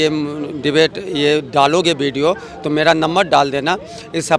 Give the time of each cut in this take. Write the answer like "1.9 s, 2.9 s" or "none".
none